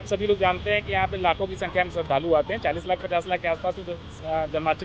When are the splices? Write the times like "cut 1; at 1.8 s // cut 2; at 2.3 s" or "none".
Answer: none